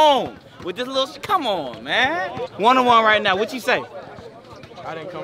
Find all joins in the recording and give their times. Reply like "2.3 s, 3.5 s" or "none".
2.4 s